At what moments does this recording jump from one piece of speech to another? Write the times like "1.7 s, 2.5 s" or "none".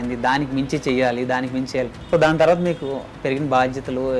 2.0 s

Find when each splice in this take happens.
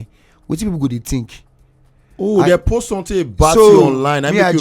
none

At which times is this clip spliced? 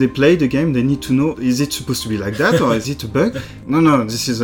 1.3 s, 3.3 s

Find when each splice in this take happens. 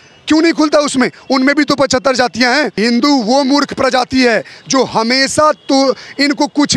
2.8 s

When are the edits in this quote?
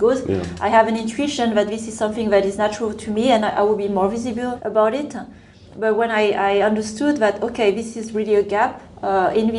2.6 s, 4.6 s

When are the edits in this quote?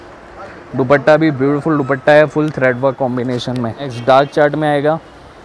4.0 s

